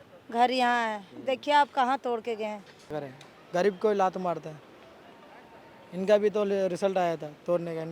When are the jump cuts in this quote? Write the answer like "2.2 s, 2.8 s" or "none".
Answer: 2.9 s